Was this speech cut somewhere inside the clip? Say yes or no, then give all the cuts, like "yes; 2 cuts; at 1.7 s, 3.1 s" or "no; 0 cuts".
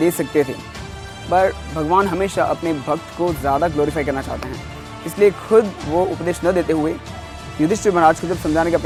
no; 0 cuts